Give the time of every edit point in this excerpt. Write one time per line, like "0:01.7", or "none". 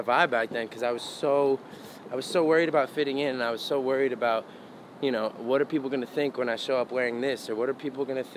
none